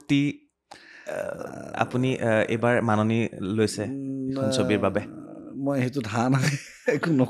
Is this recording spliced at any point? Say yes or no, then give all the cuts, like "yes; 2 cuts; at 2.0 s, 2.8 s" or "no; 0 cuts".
no; 0 cuts